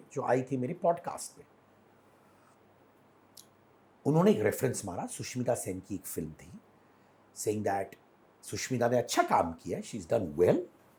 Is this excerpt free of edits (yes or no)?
yes